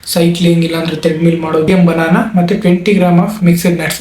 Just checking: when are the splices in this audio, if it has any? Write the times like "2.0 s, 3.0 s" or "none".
1.7 s